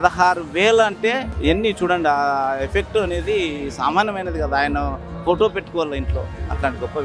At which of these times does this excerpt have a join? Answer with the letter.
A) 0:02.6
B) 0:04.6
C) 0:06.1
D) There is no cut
D